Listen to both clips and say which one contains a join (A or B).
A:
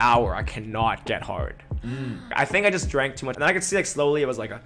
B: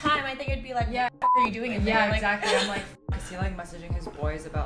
A